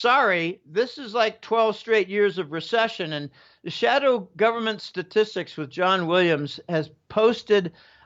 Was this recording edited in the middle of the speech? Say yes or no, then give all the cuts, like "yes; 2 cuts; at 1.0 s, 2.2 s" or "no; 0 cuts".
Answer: no; 0 cuts